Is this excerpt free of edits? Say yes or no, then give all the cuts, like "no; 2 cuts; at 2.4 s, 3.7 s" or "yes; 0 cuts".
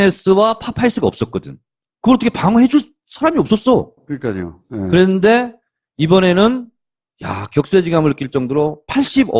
yes; 0 cuts